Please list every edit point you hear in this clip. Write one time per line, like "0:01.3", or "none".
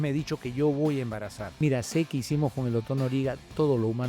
0:01.4